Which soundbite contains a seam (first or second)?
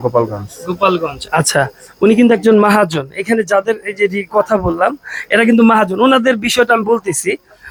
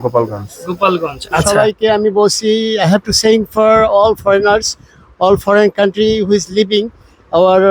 second